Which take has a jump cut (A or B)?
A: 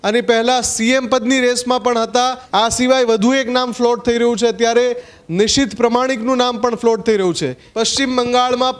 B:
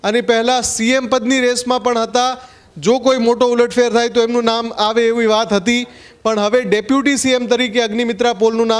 A